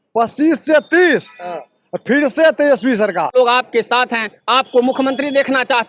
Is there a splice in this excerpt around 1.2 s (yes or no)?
no